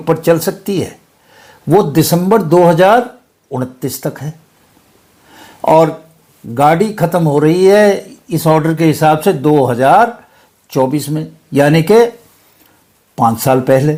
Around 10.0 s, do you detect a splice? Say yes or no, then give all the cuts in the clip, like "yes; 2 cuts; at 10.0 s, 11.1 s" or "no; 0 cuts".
no; 0 cuts